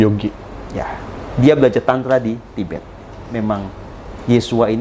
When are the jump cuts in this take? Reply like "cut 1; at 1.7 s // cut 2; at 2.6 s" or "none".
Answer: cut 1; at 3.3 s

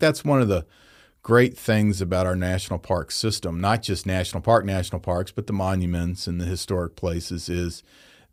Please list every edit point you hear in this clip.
none

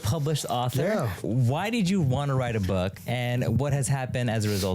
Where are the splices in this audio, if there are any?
cut 1; at 2.9 s

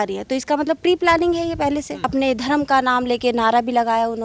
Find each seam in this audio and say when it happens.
cut 1; at 2.1 s

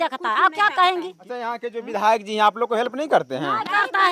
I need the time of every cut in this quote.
cut 1; at 1.2 s

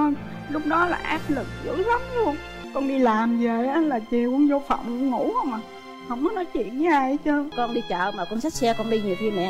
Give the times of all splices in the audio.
cut 1; at 2.6 s // cut 2; at 7.5 s

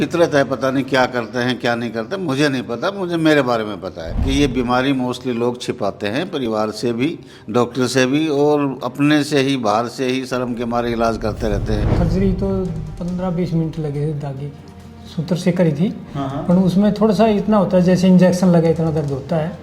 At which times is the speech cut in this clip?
cut 1; at 4.2 s // cut 2; at 11.9 s

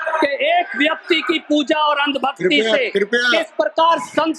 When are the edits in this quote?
none

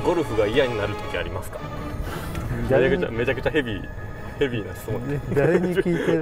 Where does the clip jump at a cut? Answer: cut 1; at 1.7 s

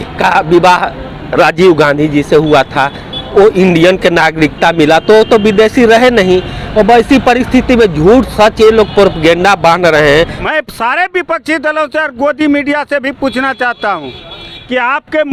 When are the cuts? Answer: cut 1; at 10.4 s

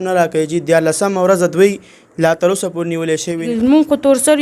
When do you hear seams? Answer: cut 1; at 3.5 s

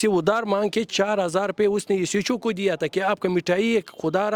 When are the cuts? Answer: none

